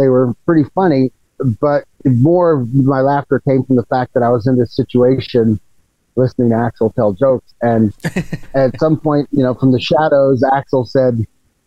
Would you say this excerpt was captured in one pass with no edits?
no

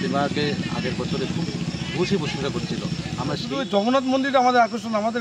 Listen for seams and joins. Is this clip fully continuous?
no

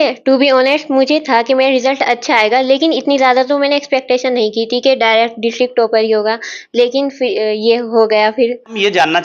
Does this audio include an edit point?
no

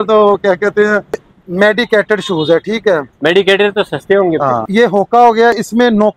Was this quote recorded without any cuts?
no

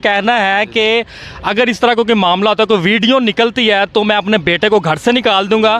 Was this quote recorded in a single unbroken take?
yes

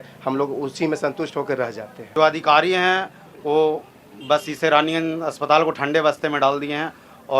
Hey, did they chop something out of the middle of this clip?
yes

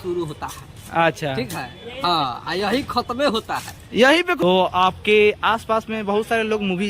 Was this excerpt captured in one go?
no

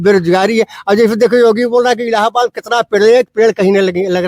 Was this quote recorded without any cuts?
yes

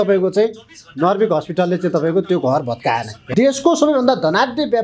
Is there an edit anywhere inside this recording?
yes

